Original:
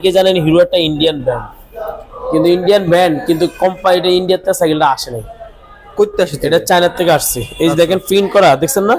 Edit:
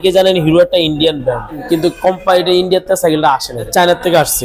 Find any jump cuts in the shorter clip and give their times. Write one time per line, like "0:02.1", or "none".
0:01.6
0:03.7